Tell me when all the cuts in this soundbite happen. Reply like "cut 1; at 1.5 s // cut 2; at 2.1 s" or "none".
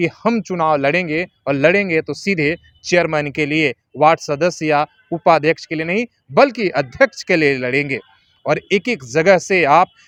none